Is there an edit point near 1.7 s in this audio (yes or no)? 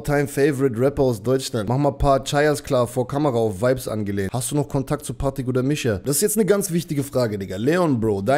yes